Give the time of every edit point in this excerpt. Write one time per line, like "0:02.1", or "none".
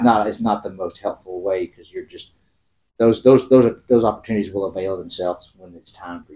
none